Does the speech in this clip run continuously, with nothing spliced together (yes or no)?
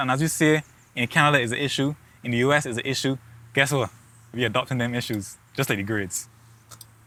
yes